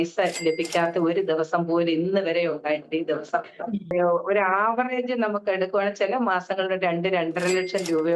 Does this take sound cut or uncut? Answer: cut